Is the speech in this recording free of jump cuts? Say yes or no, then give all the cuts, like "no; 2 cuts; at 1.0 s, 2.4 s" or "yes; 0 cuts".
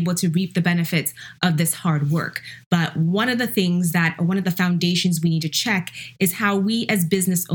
yes; 0 cuts